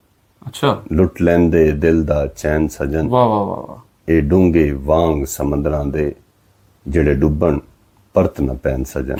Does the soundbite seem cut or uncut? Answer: uncut